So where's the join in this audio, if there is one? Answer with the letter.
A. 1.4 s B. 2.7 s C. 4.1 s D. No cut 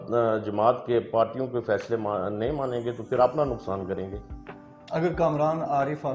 D